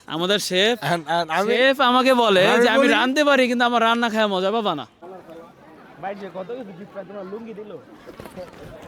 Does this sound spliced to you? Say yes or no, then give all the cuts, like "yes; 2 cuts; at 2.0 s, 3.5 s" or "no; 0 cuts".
yes; 1 cut; at 5.2 s